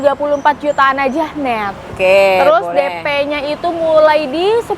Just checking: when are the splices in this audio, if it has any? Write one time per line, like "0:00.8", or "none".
0:01.9